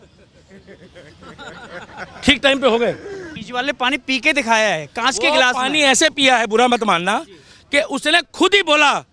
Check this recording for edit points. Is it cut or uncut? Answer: cut